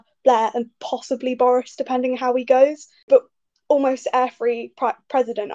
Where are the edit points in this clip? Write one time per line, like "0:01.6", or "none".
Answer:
0:03.1